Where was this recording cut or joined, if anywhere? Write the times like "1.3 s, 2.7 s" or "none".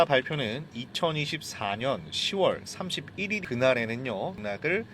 3.4 s